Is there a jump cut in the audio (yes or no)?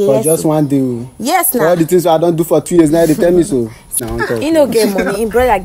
yes